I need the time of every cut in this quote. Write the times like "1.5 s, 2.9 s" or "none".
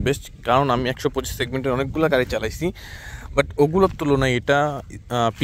none